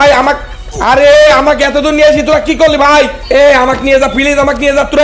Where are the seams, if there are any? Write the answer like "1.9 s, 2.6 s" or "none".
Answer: 3.2 s